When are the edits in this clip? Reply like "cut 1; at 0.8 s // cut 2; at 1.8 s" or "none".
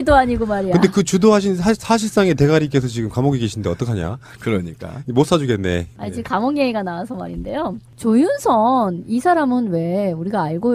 none